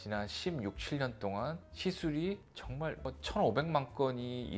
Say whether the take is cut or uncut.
uncut